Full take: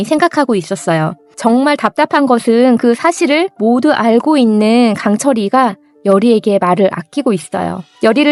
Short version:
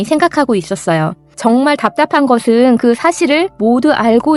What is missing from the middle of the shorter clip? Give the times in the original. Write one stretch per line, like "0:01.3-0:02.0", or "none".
none

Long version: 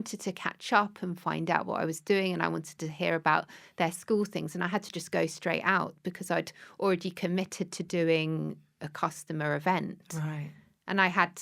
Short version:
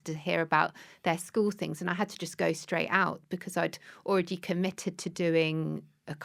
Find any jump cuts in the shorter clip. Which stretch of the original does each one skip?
none

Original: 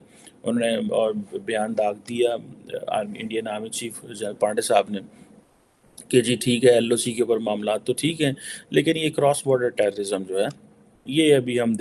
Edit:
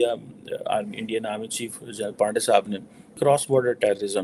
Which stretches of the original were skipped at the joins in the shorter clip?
0:05.4-0:09.1

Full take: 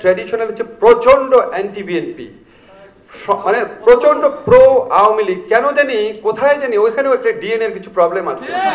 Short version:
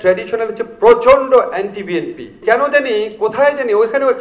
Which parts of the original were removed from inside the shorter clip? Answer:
0:02.4-0:05.4

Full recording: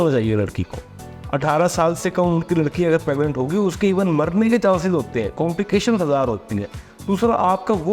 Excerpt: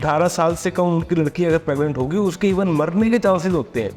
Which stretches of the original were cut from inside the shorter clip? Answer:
none

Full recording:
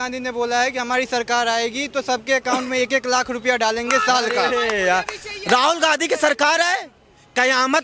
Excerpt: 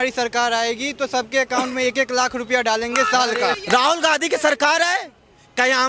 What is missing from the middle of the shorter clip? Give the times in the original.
0:04.5-0:05.3

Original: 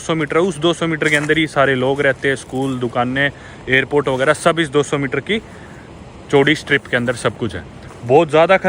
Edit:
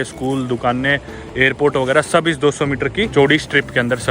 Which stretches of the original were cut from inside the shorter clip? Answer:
0:05.4-0:06.3

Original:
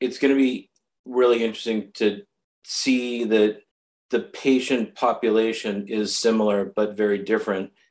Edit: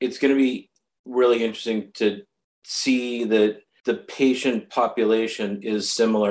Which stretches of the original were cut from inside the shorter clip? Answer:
0:03.7-0:03.9

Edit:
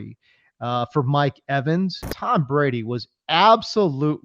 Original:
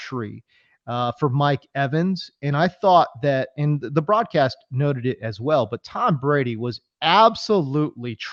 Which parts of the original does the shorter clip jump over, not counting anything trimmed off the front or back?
0:02.3-0:05.8

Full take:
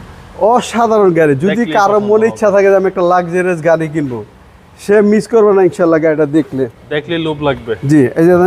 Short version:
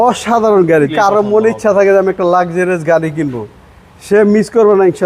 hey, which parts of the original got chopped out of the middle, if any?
0:01.4-0:01.7

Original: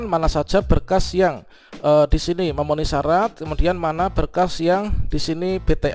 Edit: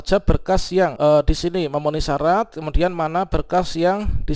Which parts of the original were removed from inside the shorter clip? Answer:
0:01.4-0:01.8

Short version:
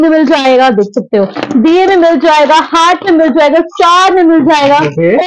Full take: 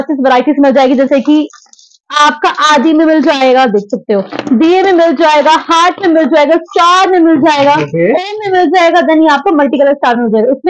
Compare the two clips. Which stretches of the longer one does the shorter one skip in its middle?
none

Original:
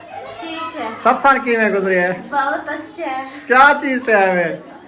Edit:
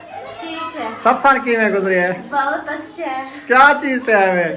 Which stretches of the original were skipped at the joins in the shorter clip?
none

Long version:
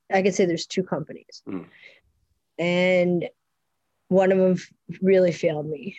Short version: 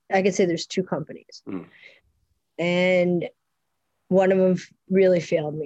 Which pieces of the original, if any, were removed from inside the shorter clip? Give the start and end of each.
0:04.7-0:04.9

